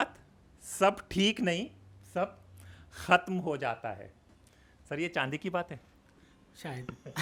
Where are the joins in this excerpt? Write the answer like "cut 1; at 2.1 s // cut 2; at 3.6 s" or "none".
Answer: none